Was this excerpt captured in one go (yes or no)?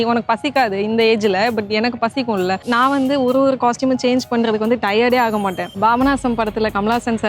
no